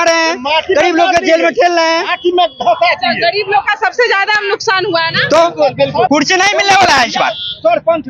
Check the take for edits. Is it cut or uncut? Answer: cut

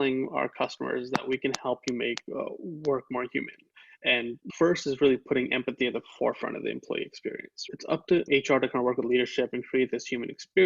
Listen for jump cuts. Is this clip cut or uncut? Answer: cut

